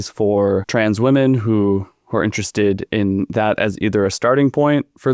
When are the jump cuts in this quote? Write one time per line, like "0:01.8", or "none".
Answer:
none